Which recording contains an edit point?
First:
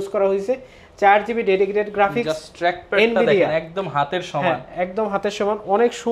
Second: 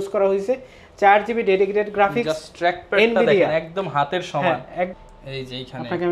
second; 1 cut; at 4.9 s

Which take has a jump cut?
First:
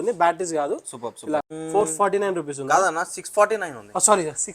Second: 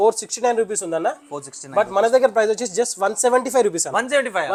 first; 1 cut; at 1.6 s

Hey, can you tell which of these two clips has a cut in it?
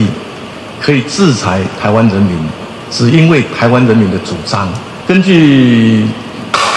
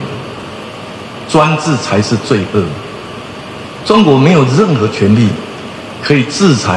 first; 1 cut; at 4.9 s

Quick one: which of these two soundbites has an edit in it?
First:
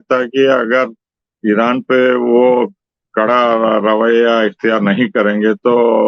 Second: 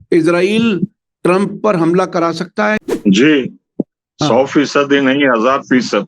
second; 1 cut; at 2.8 s

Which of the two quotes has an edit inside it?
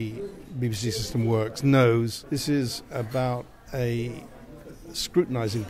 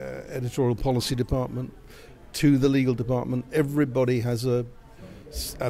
first; 1 cut; at 2.2 s

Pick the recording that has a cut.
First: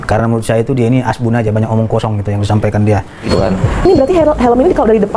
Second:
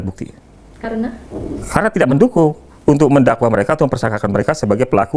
first; 1 cut; at 3.3 s

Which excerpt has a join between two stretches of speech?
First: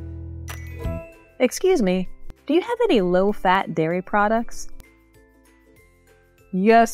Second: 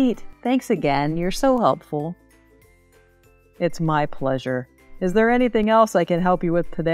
first; 1 cut; at 1.2 s

